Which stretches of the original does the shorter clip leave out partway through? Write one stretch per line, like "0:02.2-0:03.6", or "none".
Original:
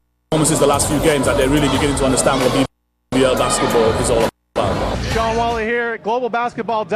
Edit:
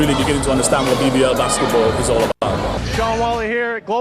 0:02.7-0:03.1
0:04.4-0:04.5